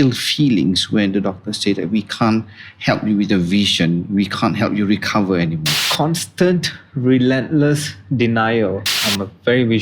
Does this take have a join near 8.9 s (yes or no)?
yes